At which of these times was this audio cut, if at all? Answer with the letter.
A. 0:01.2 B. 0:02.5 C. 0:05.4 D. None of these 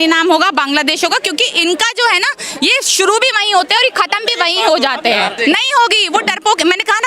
C